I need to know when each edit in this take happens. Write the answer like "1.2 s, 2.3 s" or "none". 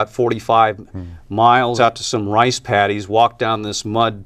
1.7 s